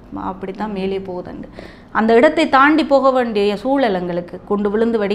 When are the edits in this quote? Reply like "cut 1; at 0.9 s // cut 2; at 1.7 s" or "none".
none